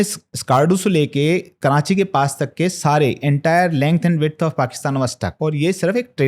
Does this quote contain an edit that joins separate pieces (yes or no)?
yes